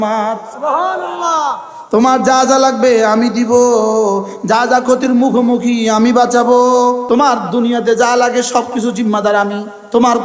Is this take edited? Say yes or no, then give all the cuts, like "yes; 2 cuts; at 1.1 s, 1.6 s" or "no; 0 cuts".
yes; 1 cut; at 7.0 s